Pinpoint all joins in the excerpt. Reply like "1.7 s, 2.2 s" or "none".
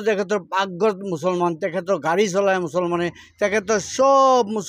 none